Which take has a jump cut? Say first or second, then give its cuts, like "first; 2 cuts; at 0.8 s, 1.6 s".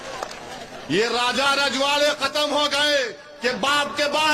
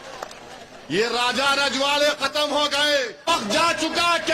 second; 1 cut; at 3.3 s